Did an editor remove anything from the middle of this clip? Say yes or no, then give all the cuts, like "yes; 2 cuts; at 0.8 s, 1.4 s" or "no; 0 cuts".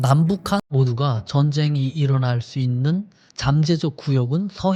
no; 0 cuts